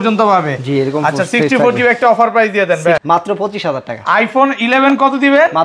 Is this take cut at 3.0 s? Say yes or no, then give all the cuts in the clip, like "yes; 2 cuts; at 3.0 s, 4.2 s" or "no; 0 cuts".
yes; 1 cut; at 3.0 s